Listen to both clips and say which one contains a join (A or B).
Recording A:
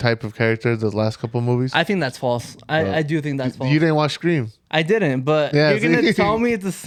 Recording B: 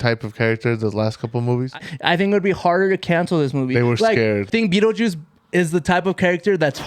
B